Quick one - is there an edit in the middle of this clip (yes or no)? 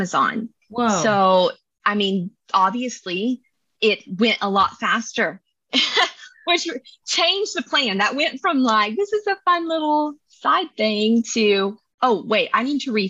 no